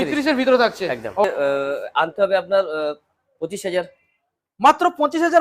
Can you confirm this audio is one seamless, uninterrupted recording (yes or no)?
no